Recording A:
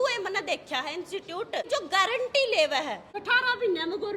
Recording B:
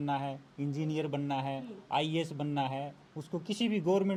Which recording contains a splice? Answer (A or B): A